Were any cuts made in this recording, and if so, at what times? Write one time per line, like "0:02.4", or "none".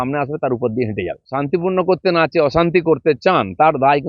0:01.2